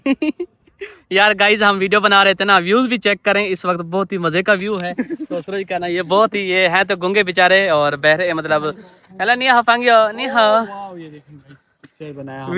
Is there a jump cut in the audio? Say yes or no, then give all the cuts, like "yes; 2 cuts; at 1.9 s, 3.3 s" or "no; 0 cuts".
no; 0 cuts